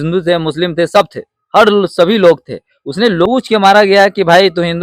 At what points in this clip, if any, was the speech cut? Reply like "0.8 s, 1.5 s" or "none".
3.2 s